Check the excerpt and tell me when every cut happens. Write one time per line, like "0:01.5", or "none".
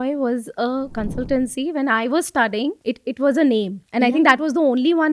0:00.9
0:02.8
0:03.8